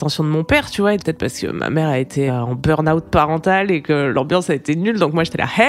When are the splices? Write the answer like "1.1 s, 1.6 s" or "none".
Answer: 1.0 s, 2.3 s